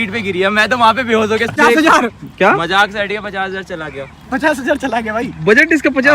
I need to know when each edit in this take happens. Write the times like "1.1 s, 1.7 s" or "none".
1.6 s